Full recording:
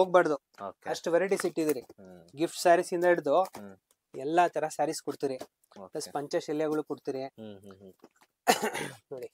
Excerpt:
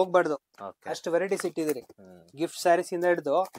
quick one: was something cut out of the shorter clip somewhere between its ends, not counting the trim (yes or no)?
no